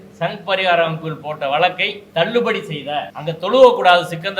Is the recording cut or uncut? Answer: cut